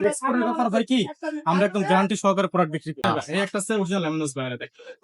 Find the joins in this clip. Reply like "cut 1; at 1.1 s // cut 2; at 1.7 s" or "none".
cut 1; at 3.0 s